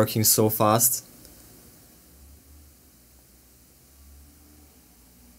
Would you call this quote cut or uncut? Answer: uncut